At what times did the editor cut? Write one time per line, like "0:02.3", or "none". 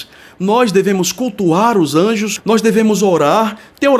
0:02.3